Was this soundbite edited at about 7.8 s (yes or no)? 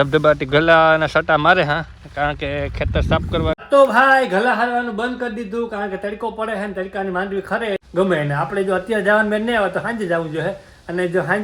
yes